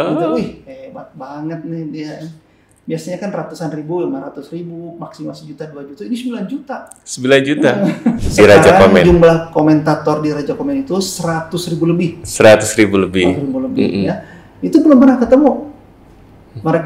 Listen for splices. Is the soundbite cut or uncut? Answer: cut